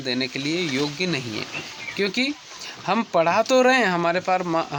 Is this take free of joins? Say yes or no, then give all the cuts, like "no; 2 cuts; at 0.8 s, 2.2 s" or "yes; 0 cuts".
yes; 0 cuts